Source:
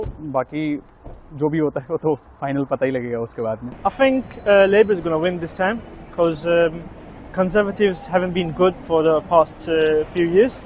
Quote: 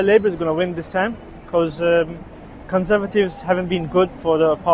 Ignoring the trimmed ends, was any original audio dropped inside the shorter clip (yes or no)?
no